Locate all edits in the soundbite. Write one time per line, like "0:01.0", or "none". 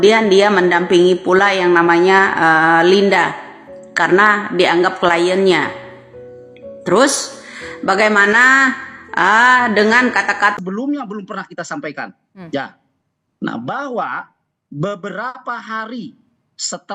0:10.6